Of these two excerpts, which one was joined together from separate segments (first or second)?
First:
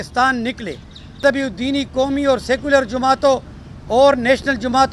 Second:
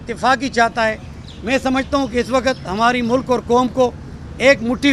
first